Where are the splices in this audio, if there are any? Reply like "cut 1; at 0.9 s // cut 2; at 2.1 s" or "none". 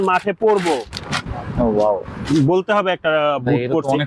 none